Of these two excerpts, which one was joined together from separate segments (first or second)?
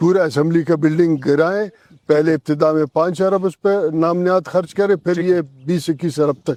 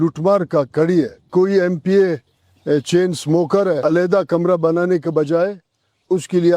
second